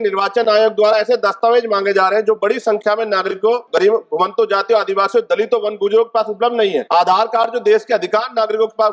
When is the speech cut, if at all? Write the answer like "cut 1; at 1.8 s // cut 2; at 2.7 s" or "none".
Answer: cut 1; at 3.7 s // cut 2; at 6.9 s